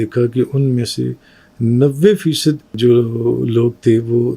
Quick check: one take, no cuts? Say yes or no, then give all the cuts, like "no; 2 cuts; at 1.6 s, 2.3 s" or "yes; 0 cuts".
no; 1 cut; at 2.7 s